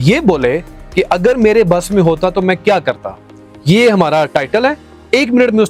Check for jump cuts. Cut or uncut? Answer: uncut